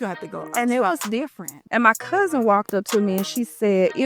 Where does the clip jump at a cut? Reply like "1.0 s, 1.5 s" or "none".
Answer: 1.5 s